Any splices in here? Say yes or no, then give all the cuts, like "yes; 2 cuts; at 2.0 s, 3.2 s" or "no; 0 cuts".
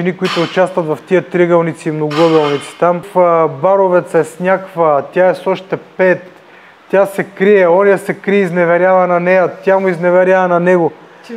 yes; 1 cut; at 3.0 s